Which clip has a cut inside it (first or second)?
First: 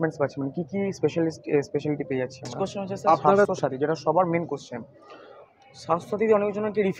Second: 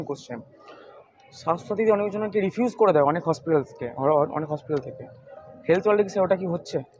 first